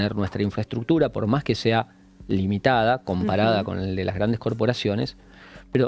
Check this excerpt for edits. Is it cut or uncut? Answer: uncut